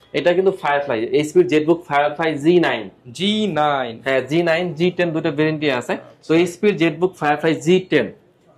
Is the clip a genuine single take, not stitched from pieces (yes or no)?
yes